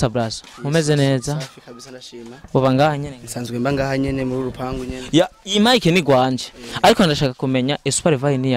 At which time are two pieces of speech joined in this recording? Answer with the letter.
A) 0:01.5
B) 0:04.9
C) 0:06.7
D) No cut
D